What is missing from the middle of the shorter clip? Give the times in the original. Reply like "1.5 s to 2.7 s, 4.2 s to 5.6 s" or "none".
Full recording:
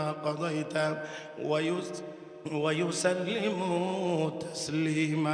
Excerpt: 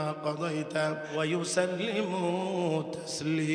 1.1 s to 2.6 s